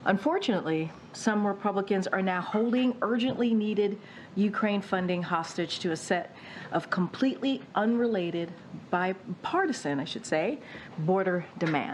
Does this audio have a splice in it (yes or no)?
no